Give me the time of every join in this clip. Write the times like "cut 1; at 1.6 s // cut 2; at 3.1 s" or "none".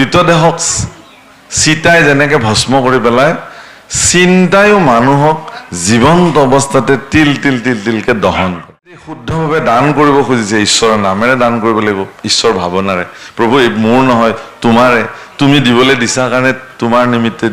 cut 1; at 9.3 s